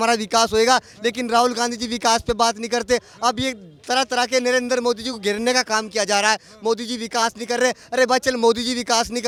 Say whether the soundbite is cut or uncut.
uncut